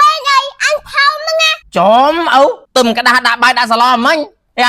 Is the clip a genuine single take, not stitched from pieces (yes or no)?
no